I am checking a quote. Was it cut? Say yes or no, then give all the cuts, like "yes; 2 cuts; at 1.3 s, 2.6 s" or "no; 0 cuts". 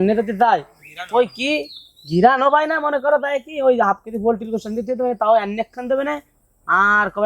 no; 0 cuts